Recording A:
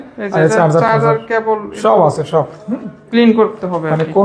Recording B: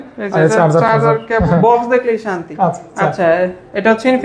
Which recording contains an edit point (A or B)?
B